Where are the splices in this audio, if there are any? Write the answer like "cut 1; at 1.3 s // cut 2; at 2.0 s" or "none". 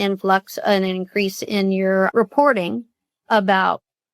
cut 1; at 2.1 s